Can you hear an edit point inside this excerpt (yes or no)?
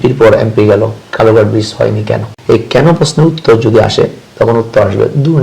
yes